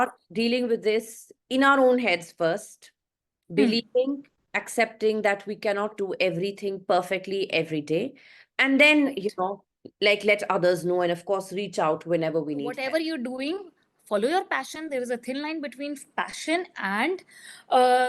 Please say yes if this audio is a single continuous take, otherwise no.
no